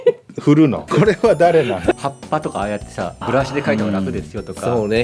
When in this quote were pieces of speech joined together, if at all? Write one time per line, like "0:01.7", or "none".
0:00.9
0:01.9
0:03.2